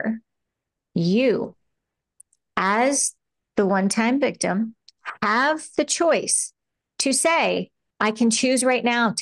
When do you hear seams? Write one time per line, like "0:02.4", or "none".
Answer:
0:07.8